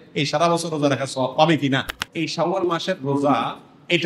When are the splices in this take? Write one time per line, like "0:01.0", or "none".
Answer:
0:02.0